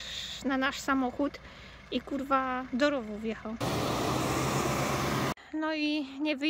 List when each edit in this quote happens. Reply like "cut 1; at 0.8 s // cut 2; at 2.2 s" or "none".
cut 1; at 3.6 s // cut 2; at 5.3 s